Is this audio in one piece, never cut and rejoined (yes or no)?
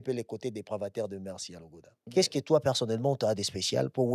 no